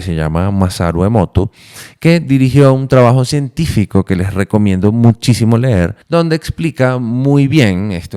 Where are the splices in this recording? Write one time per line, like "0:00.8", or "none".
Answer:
0:06.0